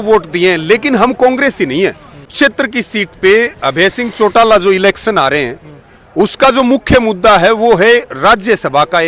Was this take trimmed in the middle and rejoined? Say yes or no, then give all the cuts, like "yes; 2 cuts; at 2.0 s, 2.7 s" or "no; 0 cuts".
yes; 1 cut; at 2.3 s